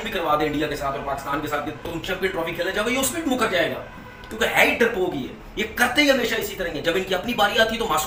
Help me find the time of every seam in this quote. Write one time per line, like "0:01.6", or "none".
none